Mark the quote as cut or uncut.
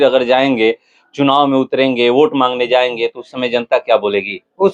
uncut